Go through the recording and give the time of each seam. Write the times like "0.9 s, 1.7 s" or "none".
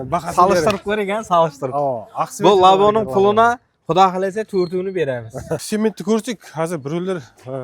5.6 s